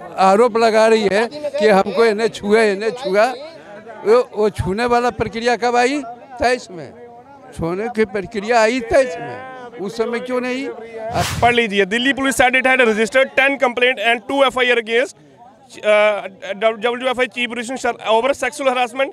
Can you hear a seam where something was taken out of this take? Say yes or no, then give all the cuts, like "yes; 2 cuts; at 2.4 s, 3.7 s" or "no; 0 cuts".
yes; 1 cut; at 11.3 s